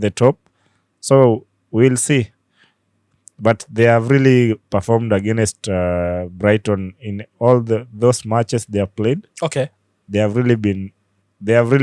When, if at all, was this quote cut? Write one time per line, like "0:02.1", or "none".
none